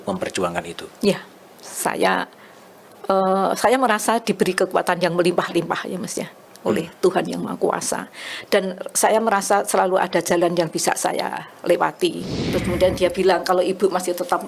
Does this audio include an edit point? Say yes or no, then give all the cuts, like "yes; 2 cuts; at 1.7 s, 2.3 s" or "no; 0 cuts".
yes; 1 cut; at 12.4 s